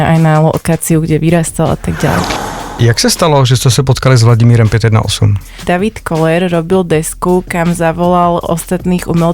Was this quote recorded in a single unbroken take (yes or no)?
no